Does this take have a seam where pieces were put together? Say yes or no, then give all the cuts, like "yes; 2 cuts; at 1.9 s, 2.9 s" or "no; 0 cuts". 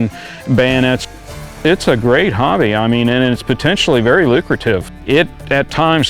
yes; 2 cuts; at 1.0 s, 4.9 s